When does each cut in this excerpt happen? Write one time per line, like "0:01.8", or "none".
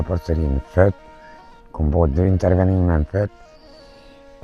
none